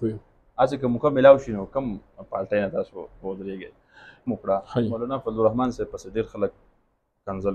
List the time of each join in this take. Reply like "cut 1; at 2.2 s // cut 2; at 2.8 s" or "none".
cut 1; at 4.3 s